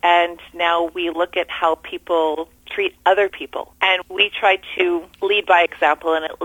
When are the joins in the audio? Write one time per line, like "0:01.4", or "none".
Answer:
0:02.6
0:04.0
0:05.1